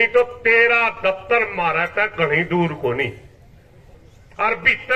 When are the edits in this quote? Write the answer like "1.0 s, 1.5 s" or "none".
none